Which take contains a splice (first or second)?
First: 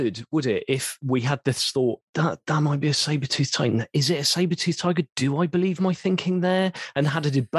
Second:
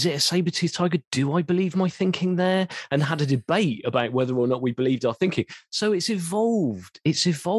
first